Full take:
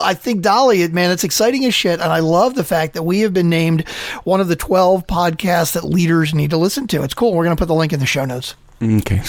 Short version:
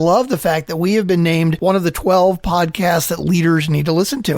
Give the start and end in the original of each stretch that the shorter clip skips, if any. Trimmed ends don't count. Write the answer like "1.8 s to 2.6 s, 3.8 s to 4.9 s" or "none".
3.8 s to 4.2 s